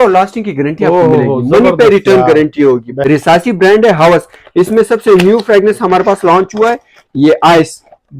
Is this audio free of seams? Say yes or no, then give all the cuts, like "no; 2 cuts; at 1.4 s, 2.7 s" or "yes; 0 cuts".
no; 1 cut; at 2.9 s